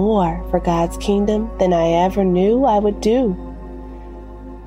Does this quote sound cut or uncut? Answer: cut